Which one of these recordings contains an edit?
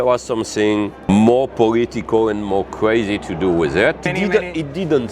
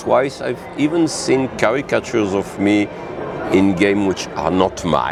first; 2 cuts; at 1.1 s, 4.1 s

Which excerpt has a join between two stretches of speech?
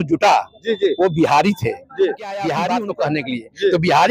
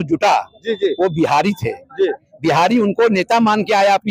first; 1 cut; at 2.7 s

